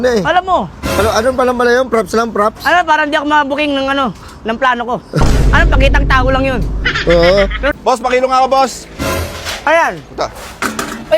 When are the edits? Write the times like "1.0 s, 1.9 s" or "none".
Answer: 7.7 s